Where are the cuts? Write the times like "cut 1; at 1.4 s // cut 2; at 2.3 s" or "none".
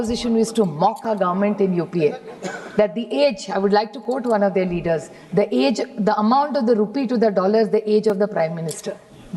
none